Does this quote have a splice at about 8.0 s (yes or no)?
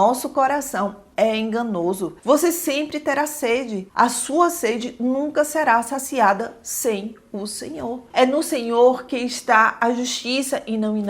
yes